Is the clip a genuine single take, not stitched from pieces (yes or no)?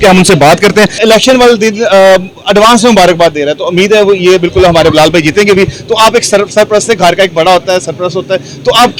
no